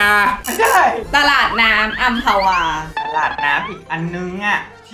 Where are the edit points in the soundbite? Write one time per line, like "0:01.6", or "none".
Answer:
0:01.0
0:03.0